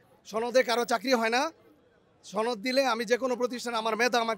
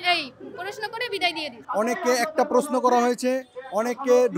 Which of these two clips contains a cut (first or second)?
second